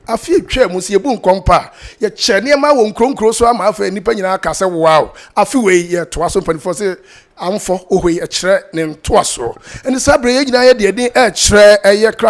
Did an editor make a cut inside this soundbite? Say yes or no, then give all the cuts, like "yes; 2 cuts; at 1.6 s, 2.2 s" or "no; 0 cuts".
no; 0 cuts